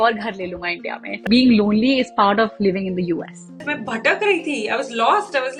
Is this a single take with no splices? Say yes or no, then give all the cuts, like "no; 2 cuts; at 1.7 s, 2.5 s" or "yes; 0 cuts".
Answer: no; 2 cuts; at 1.2 s, 3.7 s